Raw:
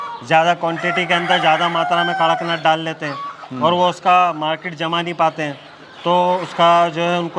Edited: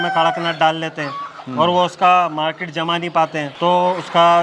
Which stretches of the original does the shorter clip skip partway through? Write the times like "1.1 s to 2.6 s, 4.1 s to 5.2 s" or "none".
5.5 s to 5.9 s